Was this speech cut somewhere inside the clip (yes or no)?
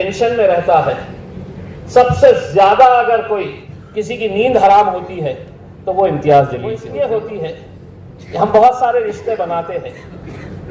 yes